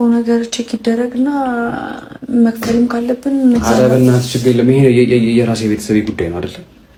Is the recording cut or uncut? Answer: uncut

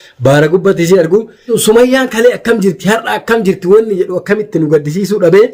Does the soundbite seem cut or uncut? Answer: cut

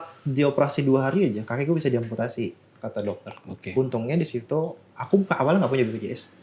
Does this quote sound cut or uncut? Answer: uncut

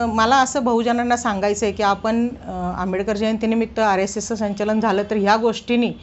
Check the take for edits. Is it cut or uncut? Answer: uncut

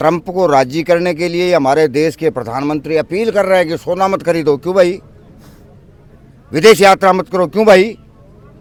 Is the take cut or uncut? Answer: uncut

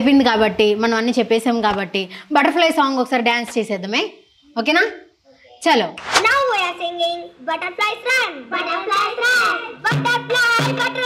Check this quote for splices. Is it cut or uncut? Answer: cut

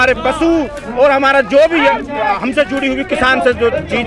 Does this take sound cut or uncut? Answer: uncut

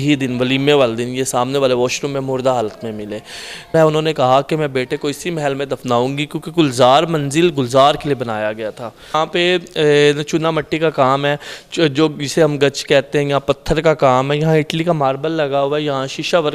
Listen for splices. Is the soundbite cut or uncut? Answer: cut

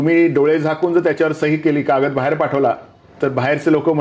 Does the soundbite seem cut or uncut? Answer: uncut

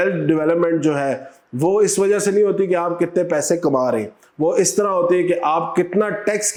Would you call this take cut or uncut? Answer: uncut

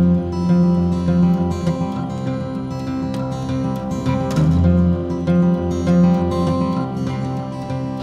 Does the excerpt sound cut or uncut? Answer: uncut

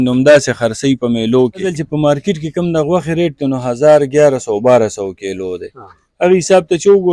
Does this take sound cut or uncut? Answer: cut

